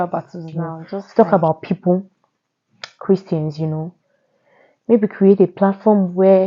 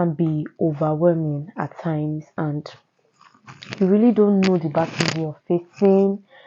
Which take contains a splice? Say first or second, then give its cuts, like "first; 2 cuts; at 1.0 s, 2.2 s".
first; 1 cut; at 1.0 s